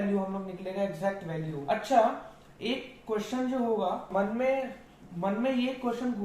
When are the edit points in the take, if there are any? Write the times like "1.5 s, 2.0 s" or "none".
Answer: 1.5 s, 4.1 s